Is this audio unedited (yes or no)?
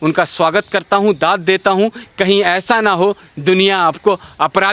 no